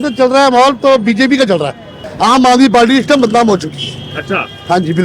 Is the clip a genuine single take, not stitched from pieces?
no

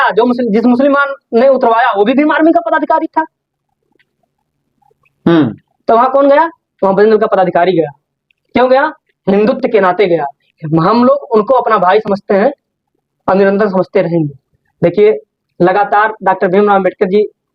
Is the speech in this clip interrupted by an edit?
no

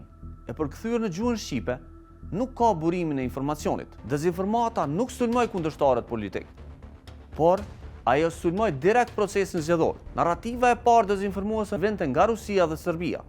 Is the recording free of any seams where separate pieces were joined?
no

